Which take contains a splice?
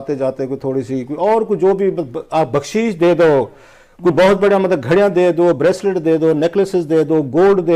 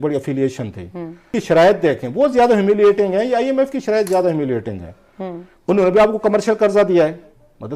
second; 1 cut; at 1.4 s

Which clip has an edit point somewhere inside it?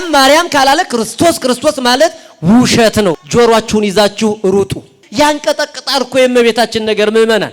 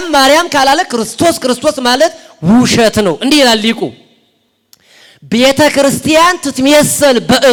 first; 2 cuts; at 3.2 s, 5.0 s

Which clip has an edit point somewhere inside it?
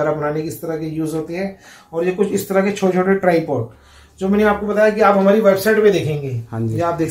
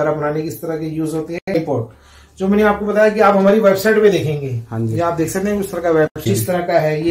second; 2 cuts; at 1.5 s, 6.2 s

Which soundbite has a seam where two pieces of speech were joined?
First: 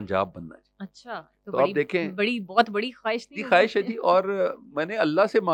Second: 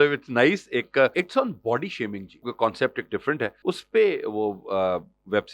second; 3 cuts; at 1.1 s, 2.5 s, 3.5 s

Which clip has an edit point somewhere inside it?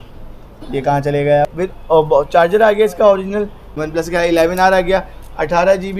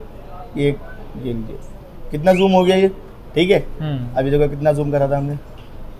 first; 2 cuts; at 1.5 s, 3.7 s

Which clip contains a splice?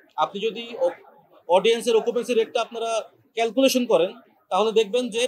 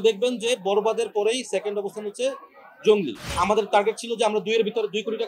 second; 1 cut; at 3.2 s

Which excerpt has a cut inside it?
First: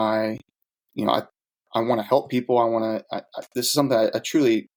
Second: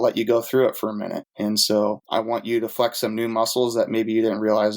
second; 2 cuts; at 1.3 s, 2.0 s

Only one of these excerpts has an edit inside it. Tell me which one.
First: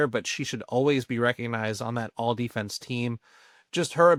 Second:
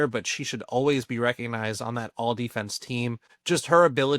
second; 1 cut; at 3.3 s

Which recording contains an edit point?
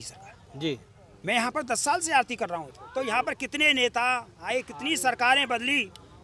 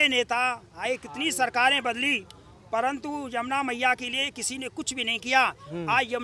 first; 1 cut; at 2.7 s

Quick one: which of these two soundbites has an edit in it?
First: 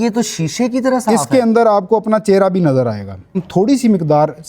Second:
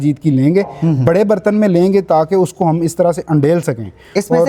first; 1 cut; at 3.4 s

